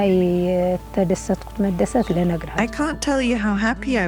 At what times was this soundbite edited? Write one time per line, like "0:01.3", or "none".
0:02.5